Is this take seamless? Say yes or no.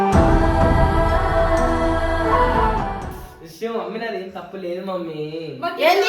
yes